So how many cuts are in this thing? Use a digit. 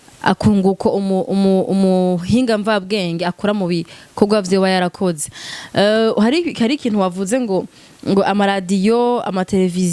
0